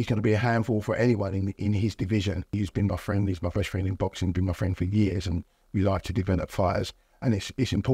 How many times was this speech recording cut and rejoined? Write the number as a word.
one